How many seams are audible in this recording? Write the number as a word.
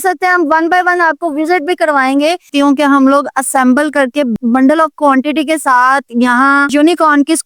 two